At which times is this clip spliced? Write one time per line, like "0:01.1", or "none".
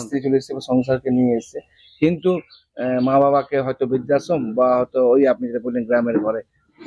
none